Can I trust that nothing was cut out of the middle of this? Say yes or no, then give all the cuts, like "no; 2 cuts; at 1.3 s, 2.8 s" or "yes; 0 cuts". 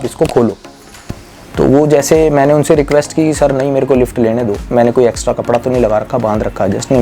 yes; 0 cuts